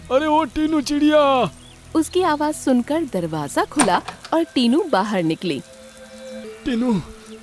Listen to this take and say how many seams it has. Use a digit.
1